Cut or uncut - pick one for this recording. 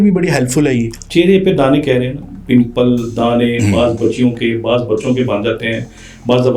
cut